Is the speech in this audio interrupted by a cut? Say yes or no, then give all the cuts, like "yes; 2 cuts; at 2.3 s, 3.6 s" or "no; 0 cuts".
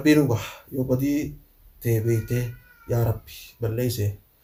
no; 0 cuts